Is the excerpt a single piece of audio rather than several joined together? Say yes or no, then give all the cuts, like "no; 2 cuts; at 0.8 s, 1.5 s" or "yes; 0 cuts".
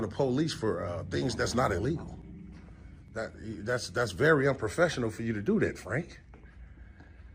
yes; 0 cuts